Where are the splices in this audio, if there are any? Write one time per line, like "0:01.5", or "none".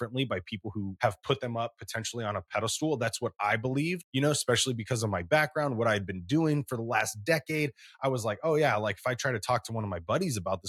0:00.9
0:04.0

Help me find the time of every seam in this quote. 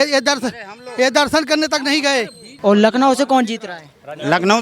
0:02.5

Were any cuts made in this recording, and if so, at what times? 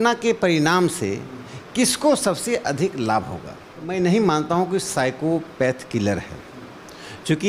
0:03.9

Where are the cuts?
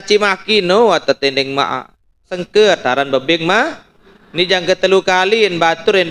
0:02.4

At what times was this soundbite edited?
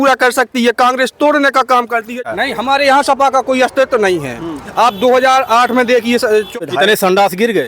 0:02.2
0:06.5

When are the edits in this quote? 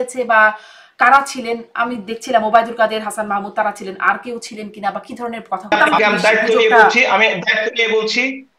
0:05.7

